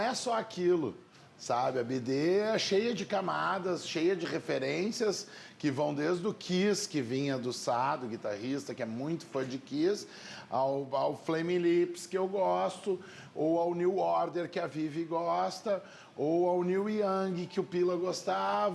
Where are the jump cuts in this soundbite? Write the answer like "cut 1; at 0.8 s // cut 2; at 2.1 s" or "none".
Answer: none